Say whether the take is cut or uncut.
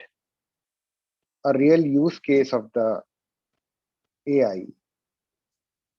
uncut